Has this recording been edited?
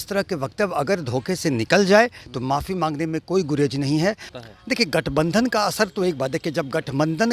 yes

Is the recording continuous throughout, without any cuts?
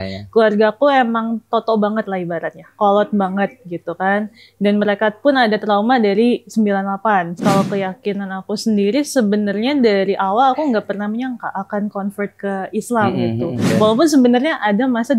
no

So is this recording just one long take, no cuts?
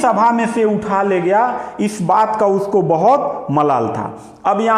yes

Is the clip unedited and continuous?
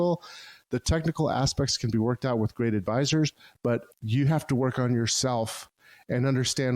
no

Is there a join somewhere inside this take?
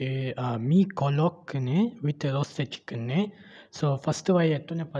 no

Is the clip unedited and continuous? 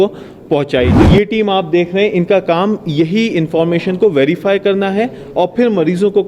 no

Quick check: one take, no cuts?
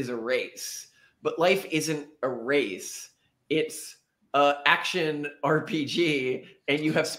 yes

